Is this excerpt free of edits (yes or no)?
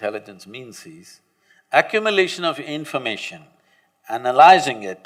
yes